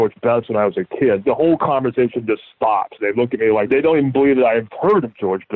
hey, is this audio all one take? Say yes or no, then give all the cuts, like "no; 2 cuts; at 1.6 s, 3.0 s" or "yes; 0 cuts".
no; 2 cuts; at 1.2 s, 3.7 s